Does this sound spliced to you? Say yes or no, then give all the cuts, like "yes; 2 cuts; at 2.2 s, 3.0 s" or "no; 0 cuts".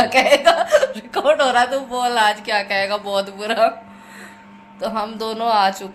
no; 0 cuts